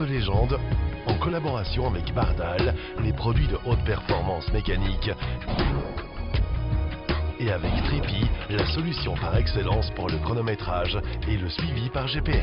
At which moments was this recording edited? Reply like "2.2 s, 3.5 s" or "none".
none